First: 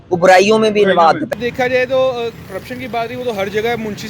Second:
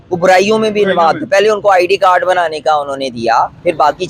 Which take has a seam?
first; 1 cut; at 1.3 s

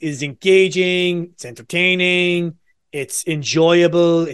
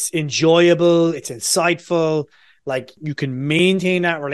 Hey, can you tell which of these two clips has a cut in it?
second; 1 cut; at 2.9 s

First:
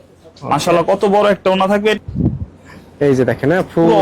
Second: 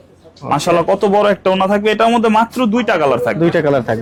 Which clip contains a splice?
first; 1 cut; at 2.0 s

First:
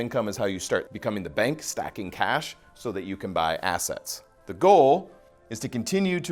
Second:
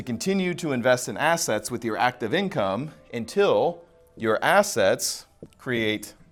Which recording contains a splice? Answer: first; 1 cut; at 0.9 s

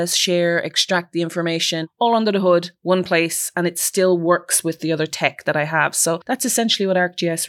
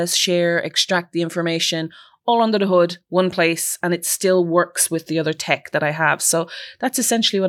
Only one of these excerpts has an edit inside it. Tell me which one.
first; 2 cuts; at 1.9 s, 6.2 s

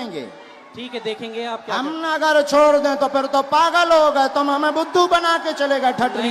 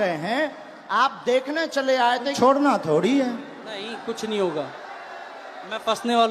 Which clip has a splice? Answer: second; 1 cut; at 2.3 s

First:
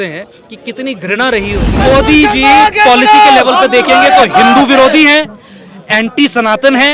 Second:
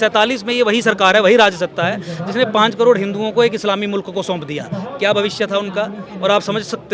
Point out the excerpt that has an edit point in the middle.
first; 1 cut; at 1.8 s

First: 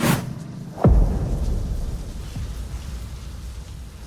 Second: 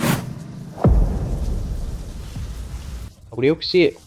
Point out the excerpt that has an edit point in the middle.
second; 1 cut; at 3.1 s

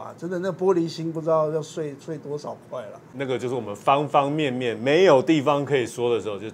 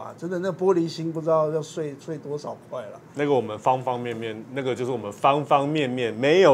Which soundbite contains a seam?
first; 1 cut; at 3.0 s

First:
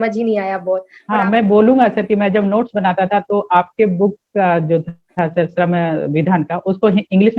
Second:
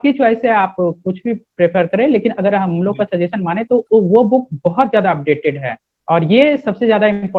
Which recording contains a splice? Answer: first; 1 cut; at 1.0 s

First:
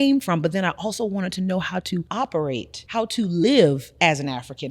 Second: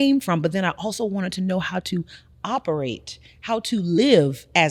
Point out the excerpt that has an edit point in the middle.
first; 2 cuts; at 2.1 s, 2.8 s

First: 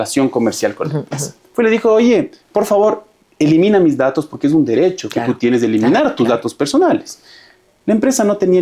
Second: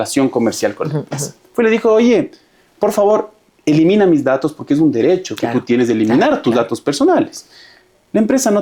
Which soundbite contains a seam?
first; 1 cut; at 2.4 s

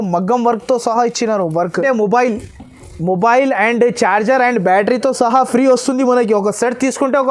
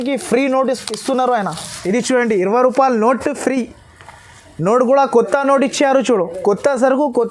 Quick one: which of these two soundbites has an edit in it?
first; 1 cut; at 1.8 s

